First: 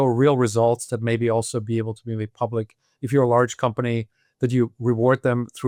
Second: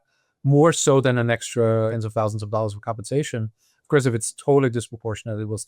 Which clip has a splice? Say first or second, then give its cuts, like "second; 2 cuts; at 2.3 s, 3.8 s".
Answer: second; 1 cut; at 1.9 s